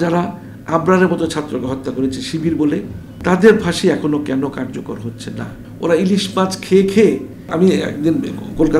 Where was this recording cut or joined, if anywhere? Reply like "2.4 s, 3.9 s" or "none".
3.0 s, 5.6 s, 7.5 s